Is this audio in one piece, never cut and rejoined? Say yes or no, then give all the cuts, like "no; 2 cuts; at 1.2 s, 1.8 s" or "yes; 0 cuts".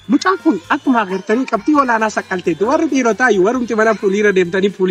yes; 0 cuts